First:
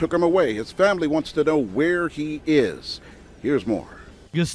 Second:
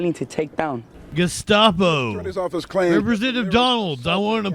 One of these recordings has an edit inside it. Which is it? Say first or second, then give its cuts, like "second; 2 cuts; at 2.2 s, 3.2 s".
second; 1 cut; at 0.9 s